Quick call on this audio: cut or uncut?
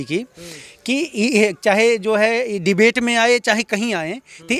uncut